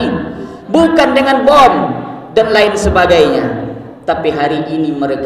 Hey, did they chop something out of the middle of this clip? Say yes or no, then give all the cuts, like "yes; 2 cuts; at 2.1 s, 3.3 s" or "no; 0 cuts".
no; 0 cuts